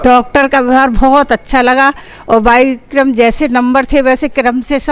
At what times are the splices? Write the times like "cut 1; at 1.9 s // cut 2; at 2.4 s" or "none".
none